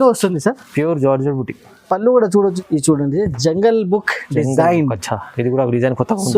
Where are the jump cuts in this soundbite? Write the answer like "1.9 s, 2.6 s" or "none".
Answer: 2.6 s

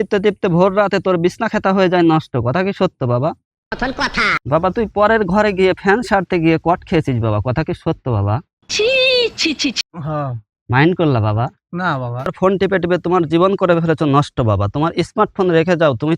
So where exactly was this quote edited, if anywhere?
3.8 s, 12.3 s

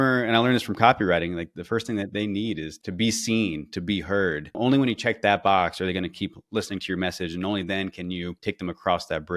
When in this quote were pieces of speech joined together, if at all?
1.5 s, 2.7 s, 4.6 s, 8.3 s

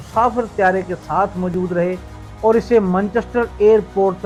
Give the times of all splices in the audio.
none

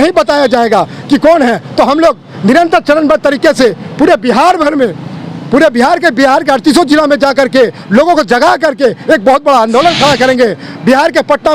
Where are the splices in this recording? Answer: none

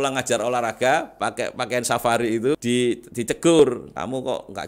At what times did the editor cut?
2.6 s, 3.6 s

